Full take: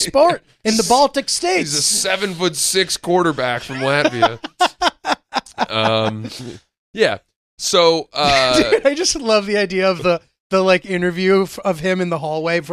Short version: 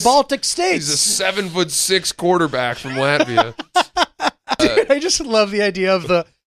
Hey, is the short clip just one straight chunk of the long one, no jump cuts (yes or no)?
no